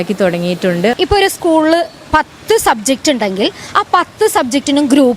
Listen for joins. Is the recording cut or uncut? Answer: cut